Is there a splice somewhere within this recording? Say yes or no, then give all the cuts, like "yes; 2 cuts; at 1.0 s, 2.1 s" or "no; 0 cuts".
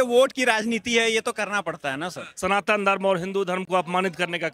yes; 1 cut; at 2.4 s